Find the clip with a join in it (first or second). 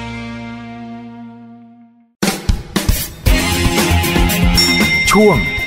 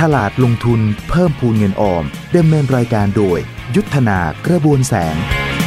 first